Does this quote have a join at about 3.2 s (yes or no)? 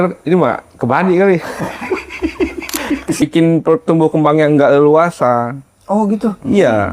yes